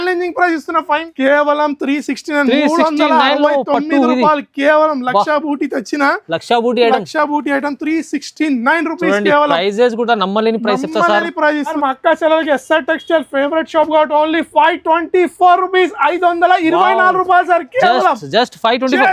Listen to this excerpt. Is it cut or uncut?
cut